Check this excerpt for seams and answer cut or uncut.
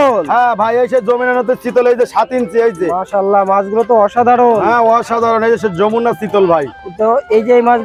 uncut